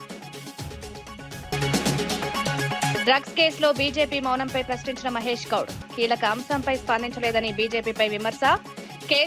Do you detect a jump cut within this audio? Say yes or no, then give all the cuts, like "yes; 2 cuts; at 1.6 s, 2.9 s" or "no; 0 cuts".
yes; 2 cuts; at 1.5 s, 3.0 s